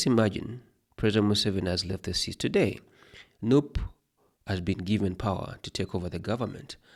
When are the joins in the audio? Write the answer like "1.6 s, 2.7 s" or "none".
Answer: none